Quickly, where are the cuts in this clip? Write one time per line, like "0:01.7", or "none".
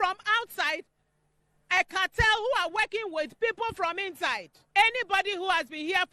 none